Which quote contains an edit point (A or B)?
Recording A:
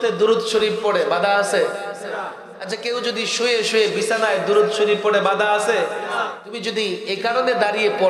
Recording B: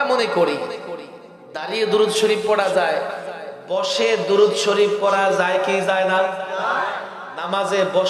A